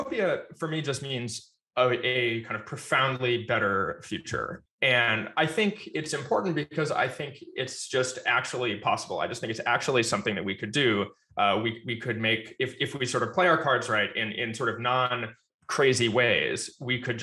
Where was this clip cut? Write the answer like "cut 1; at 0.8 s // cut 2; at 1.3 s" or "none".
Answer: none